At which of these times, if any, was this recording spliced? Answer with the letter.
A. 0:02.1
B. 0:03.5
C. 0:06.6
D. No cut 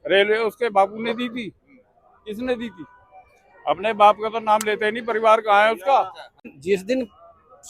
C